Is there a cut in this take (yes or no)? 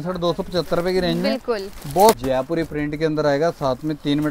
yes